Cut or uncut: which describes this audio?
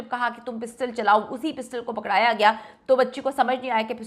uncut